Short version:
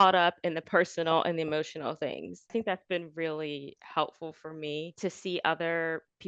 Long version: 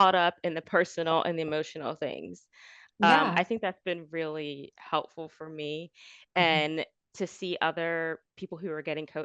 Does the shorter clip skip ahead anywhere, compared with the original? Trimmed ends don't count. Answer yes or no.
yes